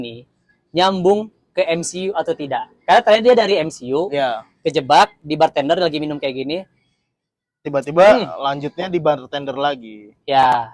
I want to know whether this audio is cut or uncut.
uncut